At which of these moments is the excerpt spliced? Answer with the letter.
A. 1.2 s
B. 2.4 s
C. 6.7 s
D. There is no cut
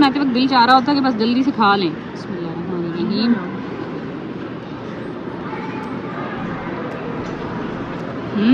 D